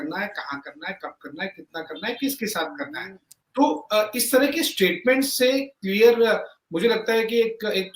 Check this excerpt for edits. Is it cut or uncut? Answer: uncut